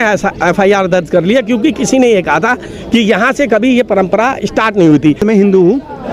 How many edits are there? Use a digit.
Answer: 1